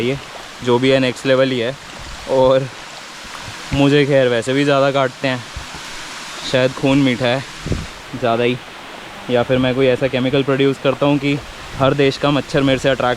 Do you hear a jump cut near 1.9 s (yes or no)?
no